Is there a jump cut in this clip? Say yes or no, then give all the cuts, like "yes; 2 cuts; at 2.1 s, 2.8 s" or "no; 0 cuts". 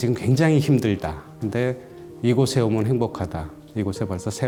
no; 0 cuts